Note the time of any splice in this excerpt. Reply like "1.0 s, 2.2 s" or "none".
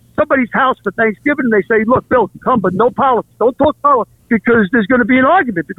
4.2 s